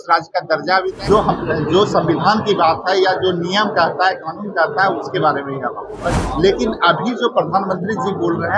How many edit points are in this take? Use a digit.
2